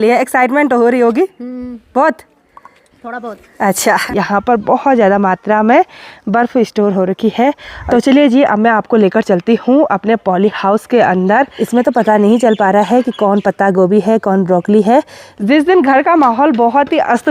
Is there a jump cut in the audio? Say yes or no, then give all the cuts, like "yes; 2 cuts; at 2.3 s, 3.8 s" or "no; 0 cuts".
yes; 4 cuts; at 4.0 s, 7.7 s, 11.6 s, 15.3 s